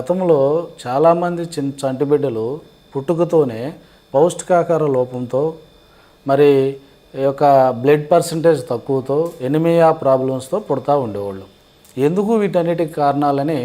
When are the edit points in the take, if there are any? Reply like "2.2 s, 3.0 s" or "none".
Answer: 7.5 s, 8.4 s